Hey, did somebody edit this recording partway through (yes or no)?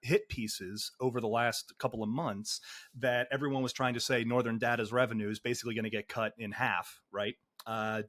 no